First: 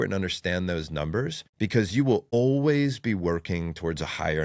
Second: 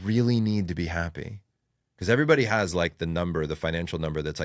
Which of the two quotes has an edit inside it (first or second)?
first